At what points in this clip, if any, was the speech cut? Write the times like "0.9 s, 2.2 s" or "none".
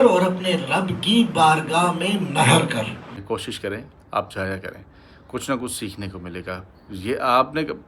3.1 s